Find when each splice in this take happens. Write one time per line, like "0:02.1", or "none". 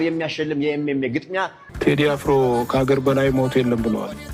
0:01.6